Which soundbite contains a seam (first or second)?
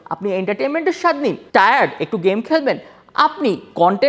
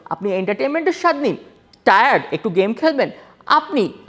first